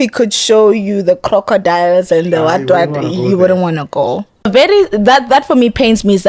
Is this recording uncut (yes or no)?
no